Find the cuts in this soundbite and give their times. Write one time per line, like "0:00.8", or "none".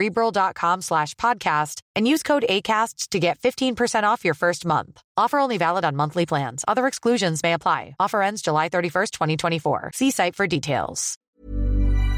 0:11.3